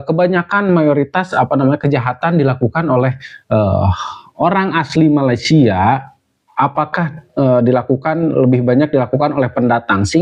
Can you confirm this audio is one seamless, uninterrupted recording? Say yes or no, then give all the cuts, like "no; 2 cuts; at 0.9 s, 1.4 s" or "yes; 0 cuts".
yes; 0 cuts